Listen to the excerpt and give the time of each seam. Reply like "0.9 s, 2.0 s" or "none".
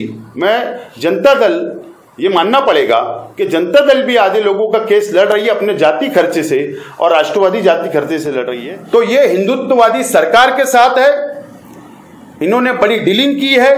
8.5 s